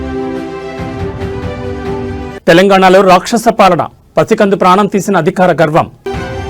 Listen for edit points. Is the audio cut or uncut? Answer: cut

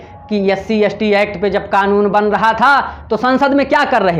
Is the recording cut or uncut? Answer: uncut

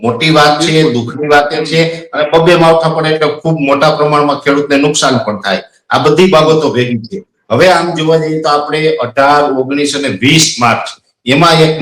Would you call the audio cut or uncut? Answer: uncut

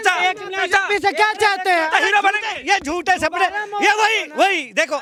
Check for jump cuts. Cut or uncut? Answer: uncut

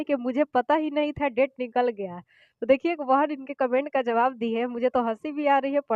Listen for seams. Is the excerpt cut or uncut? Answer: uncut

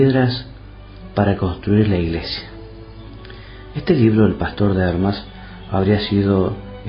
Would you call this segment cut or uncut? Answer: uncut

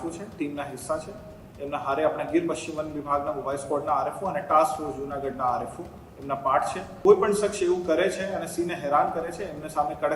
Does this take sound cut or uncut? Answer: cut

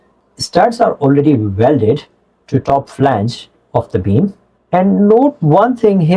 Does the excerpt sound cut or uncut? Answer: cut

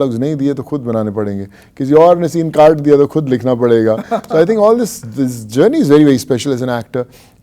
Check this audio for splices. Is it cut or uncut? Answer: uncut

